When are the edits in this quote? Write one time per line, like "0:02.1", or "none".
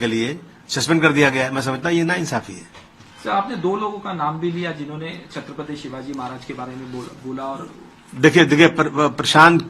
none